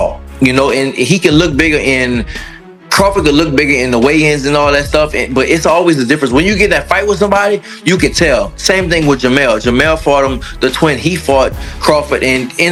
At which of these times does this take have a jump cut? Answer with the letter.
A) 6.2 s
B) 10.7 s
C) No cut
C